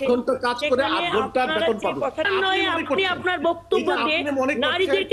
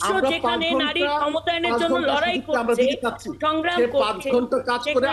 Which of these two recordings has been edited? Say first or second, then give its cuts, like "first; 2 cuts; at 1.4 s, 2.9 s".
first; 1 cut; at 2.3 s